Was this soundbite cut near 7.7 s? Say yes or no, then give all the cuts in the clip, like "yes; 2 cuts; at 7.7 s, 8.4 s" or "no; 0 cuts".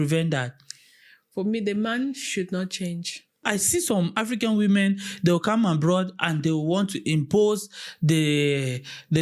no; 1 cut; at 3.4 s